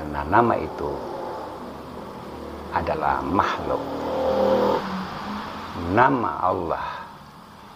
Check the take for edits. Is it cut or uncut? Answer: uncut